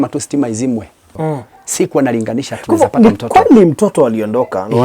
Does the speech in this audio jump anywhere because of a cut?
yes; 1 cut; at 1.1 s

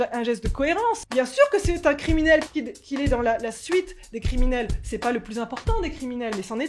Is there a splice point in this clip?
yes; 2 cuts; at 1.0 s, 2.5 s

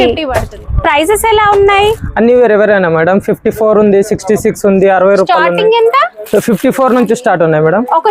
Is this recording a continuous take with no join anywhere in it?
yes; 0 cuts

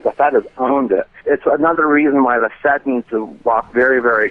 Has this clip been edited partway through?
yes; 1 cut; at 1.1 s

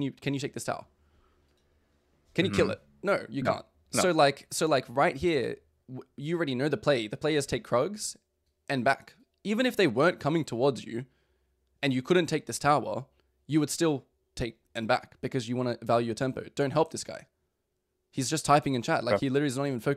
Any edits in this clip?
no; 0 cuts

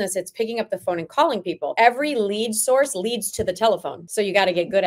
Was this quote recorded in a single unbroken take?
no; 2 cuts; at 1.7 s, 4.0 s

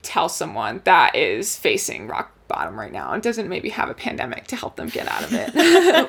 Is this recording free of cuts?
yes; 0 cuts

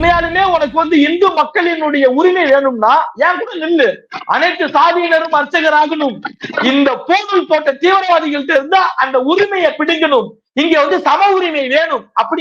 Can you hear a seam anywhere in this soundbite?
no; 0 cuts

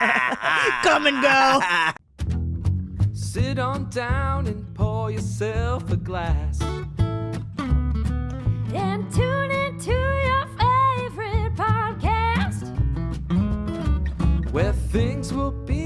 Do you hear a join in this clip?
yes; 1 cut; at 1.9 s

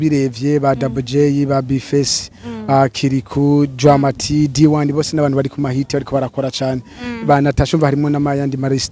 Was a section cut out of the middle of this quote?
no; 0 cuts

